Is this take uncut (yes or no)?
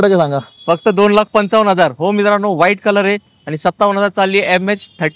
yes